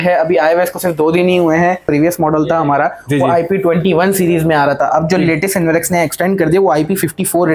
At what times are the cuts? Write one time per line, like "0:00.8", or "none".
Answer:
0:01.8